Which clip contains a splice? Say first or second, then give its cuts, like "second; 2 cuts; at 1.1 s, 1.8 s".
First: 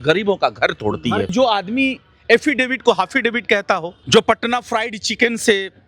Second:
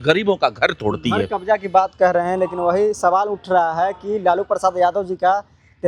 first; 2 cuts; at 1.3 s, 3.9 s